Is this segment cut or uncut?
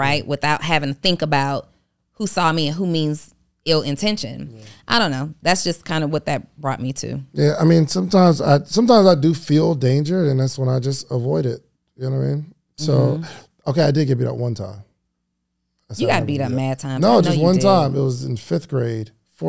uncut